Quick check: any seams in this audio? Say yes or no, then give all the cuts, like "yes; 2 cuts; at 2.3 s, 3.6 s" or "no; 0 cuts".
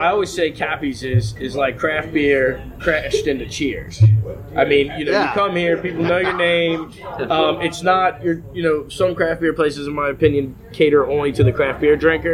no; 0 cuts